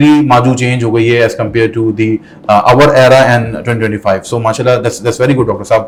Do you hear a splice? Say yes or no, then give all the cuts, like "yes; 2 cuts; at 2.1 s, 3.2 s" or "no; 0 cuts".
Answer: no; 0 cuts